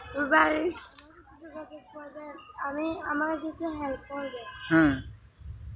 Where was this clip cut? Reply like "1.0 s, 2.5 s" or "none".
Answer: 1.3 s